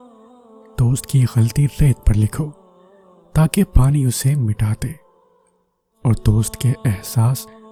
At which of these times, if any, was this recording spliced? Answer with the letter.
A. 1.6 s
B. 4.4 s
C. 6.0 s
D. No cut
D